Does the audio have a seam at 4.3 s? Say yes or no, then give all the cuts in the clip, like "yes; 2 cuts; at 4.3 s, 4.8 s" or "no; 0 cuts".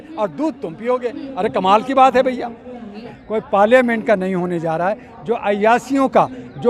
yes; 2 cuts; at 3.0 s, 4.3 s